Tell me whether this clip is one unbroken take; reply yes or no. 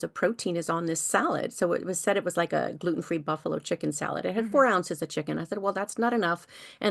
yes